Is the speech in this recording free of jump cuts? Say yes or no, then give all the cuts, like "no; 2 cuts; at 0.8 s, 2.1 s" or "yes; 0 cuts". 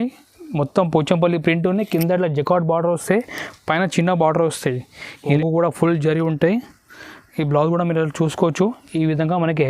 no; 1 cut; at 5.3 s